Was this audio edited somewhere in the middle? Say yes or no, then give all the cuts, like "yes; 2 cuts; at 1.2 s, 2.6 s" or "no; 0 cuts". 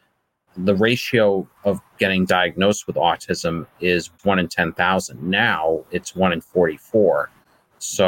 no; 0 cuts